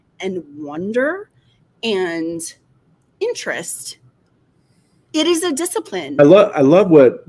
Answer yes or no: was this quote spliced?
yes